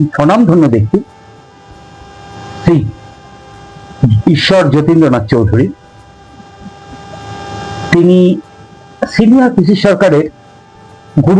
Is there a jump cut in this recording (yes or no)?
no